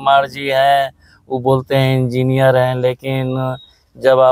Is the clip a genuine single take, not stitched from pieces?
yes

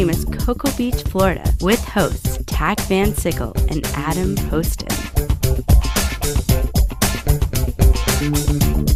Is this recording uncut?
yes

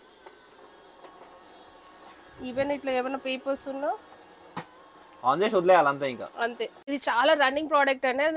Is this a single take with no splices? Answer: no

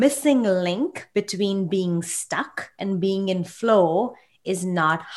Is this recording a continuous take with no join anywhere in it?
yes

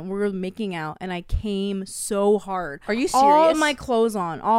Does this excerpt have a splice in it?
no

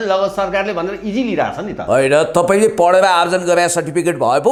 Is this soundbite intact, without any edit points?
yes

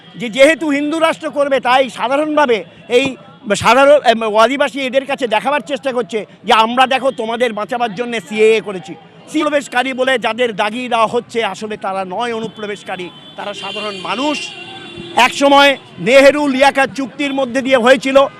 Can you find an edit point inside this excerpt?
yes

